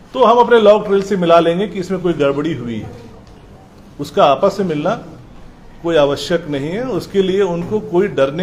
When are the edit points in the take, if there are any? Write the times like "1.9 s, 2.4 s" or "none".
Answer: none